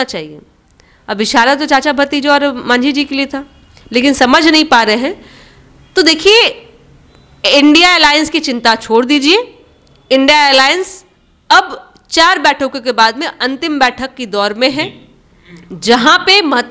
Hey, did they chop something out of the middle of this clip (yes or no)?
no